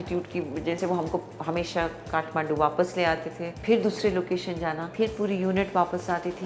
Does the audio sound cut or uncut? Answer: uncut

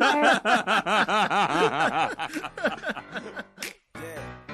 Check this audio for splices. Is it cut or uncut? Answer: cut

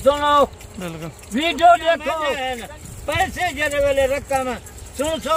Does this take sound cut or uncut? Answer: cut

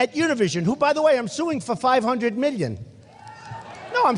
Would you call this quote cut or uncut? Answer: uncut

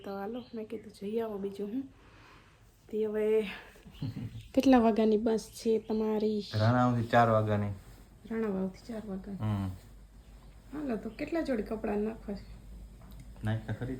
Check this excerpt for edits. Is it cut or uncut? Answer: uncut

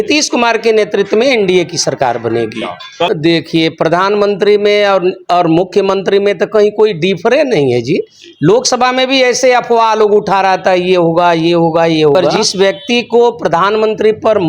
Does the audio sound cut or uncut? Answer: cut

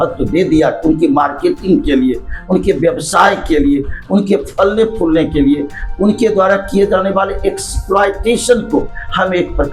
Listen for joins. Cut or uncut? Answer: uncut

